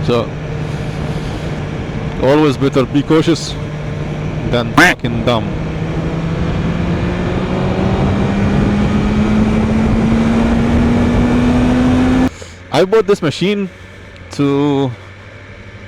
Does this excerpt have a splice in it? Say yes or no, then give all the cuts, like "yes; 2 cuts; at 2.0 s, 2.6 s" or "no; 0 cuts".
yes; 1 cut; at 12.3 s